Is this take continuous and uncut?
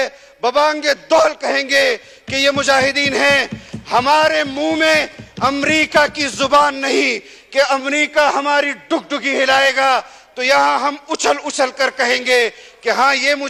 yes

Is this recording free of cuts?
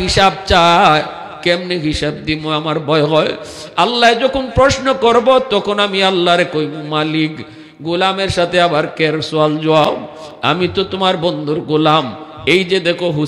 yes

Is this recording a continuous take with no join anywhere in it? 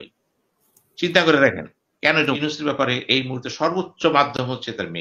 no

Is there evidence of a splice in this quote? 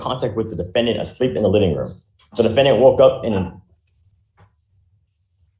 no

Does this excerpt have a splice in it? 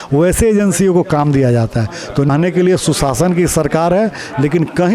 yes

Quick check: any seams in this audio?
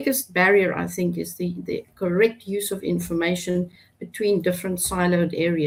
no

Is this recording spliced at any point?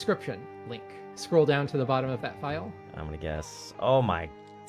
yes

